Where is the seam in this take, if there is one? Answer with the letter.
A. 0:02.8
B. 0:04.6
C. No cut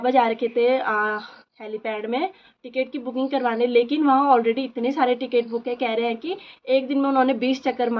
C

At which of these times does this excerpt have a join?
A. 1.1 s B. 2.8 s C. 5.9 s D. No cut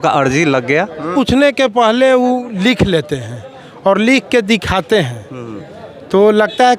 A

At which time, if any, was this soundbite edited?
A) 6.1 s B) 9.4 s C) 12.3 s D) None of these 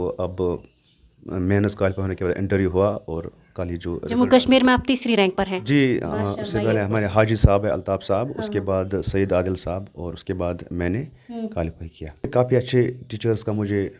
C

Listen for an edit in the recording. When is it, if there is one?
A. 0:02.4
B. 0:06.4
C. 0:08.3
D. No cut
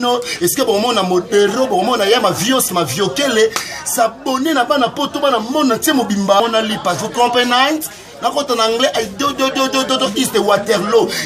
B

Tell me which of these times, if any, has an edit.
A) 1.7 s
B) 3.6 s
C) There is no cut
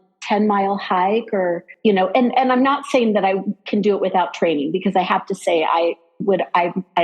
A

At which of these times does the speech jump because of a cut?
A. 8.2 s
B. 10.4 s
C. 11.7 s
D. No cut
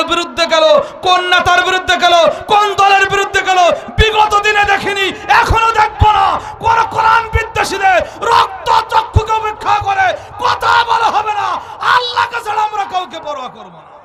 D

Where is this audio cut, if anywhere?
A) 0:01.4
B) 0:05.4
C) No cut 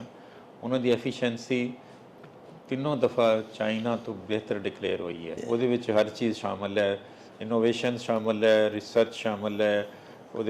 B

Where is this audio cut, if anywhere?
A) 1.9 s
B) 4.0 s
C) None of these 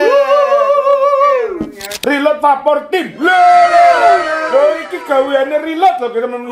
A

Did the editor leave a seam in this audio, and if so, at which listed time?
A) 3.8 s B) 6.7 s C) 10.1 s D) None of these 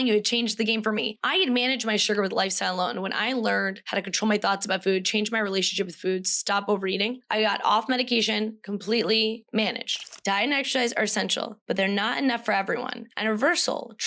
C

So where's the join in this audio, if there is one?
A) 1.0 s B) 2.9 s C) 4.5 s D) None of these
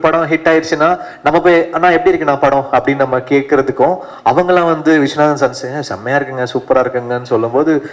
D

